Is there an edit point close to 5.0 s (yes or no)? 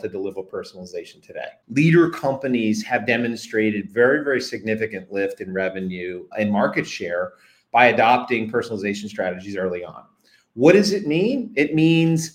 no